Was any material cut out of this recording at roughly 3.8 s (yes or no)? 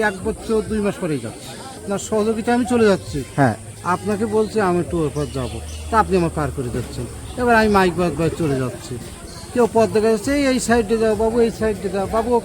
no